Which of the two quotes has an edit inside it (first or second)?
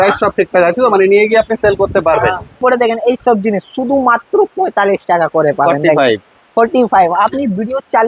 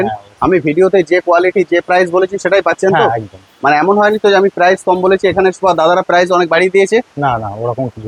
first